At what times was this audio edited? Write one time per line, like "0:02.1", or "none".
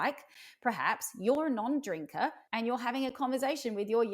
0:02.4